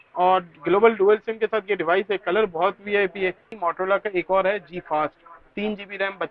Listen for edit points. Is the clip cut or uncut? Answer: cut